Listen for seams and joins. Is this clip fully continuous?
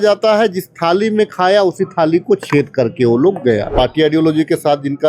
no; 1 cut; at 3.7 s

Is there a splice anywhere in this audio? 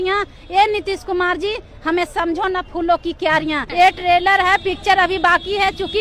yes; 1 cut; at 3.6 s

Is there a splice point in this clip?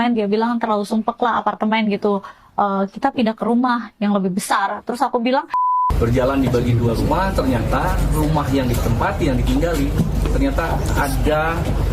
yes; 1 cut; at 5.8 s

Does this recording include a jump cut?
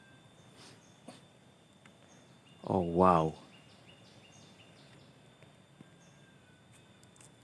yes; 1 cut; at 2.2 s

